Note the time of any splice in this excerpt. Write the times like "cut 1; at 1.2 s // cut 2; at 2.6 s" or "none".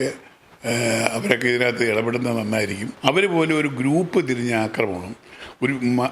cut 1; at 2.9 s